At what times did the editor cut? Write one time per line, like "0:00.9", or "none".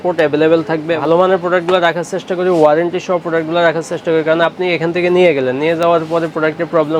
0:01.0